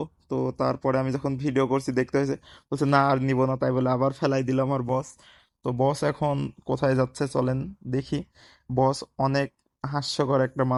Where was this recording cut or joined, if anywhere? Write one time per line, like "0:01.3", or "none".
none